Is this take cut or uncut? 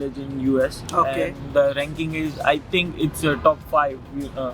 uncut